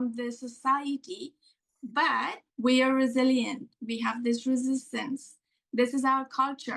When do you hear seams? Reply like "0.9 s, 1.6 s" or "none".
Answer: 2.4 s